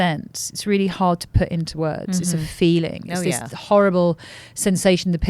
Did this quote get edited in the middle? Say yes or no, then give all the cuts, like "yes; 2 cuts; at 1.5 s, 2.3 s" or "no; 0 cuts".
no; 0 cuts